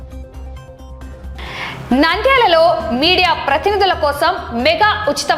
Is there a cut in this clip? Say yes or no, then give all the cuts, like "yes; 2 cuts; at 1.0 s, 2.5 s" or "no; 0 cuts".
yes; 1 cut; at 1.4 s